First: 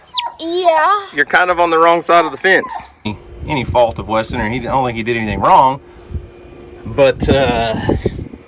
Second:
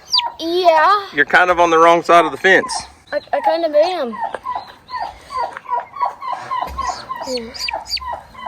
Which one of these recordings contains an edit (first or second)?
first